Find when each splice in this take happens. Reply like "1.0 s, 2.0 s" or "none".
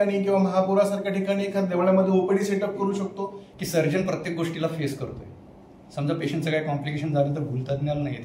3.4 s